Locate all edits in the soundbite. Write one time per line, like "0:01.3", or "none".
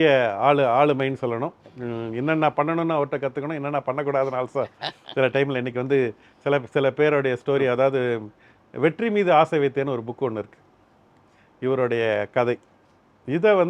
none

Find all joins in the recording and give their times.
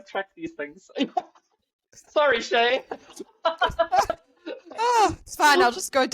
none

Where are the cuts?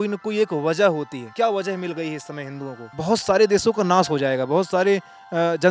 0:01.2
0:02.9

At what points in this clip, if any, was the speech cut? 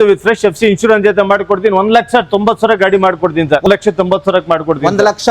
0:03.6

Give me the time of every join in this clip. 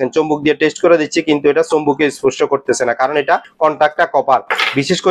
0:03.5

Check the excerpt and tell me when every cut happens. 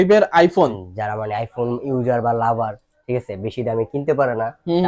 none

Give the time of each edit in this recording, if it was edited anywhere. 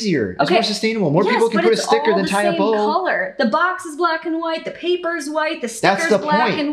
none

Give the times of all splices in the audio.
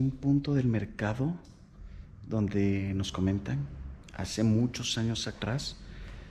none

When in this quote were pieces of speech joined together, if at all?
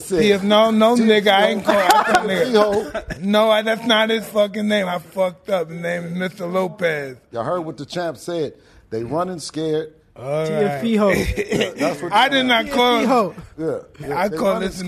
0:07.3
0:10.1

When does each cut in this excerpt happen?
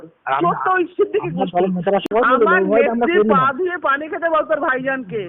0:02.0

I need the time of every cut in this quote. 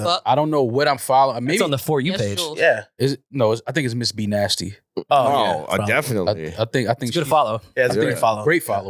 none

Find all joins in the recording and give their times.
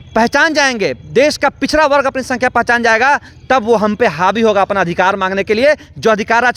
none

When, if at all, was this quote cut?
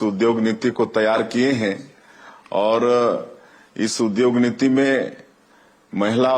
0:04.9

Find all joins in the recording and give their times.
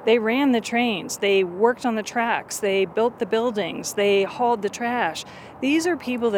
none

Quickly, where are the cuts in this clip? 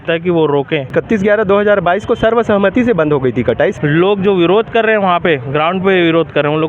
0:00.9
0:03.7

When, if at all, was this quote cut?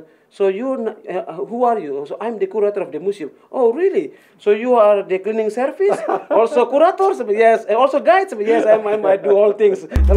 none

